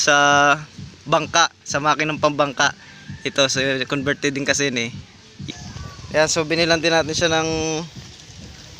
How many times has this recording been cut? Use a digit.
1